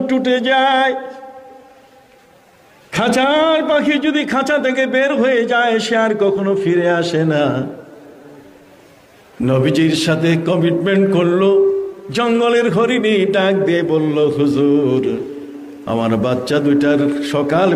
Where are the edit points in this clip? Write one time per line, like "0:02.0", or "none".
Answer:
none